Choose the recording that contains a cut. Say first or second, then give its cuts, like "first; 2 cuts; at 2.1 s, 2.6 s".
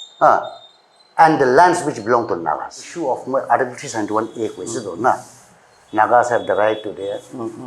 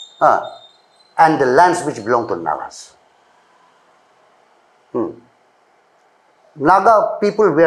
first; 1 cut; at 2.9 s